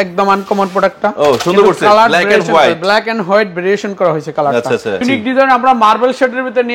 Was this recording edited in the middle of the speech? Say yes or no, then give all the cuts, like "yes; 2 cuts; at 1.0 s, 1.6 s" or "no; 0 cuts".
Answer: yes; 1 cut; at 5.0 s